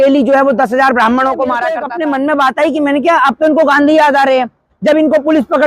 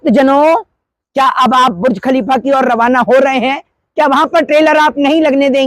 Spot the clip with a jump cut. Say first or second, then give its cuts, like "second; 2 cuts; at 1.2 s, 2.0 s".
first; 1 cut; at 1.8 s